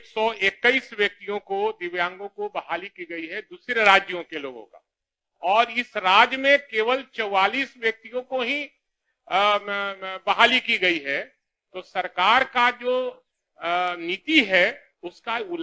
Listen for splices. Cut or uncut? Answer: uncut